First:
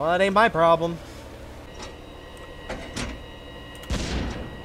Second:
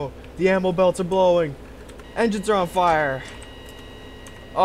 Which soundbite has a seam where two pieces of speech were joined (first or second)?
first